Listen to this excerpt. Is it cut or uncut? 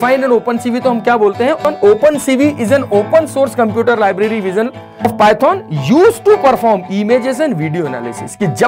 cut